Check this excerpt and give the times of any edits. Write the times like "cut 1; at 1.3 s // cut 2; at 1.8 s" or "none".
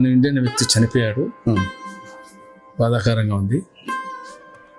cut 1; at 3.7 s